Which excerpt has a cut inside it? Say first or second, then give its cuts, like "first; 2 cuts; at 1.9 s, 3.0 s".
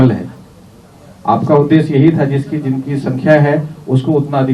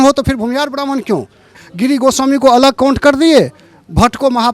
second; 1 cut; at 1.6 s